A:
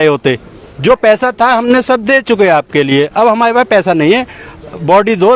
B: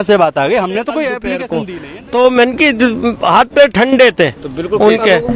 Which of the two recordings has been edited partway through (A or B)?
B